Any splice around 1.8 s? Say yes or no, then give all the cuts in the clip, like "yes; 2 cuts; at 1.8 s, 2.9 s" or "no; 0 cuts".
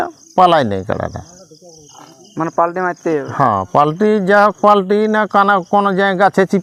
no; 0 cuts